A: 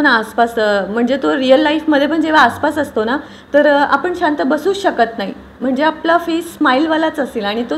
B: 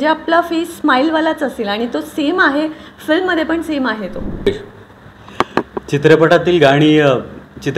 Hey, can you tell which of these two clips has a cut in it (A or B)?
B